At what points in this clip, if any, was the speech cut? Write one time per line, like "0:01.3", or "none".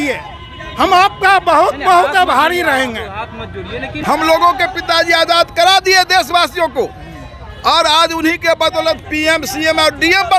0:03.9